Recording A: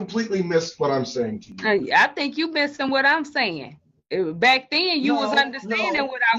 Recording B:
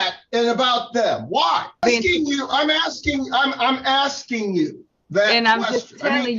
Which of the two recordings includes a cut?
B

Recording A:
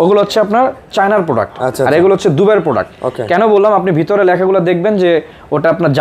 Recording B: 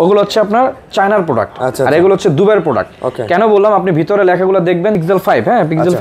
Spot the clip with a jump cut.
B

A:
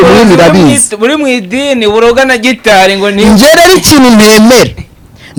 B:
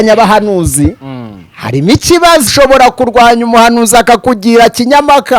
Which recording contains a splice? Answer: B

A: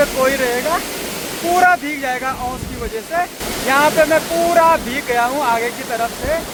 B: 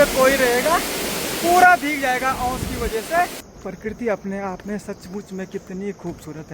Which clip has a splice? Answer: B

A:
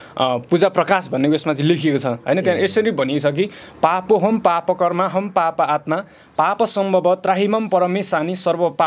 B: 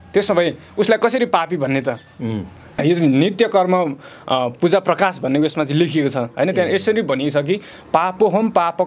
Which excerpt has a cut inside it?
B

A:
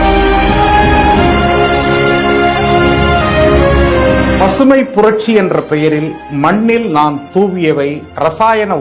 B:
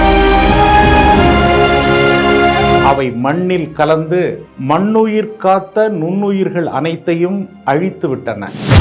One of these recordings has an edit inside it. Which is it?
A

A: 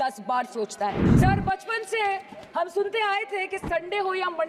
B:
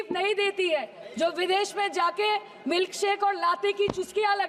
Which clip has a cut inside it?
A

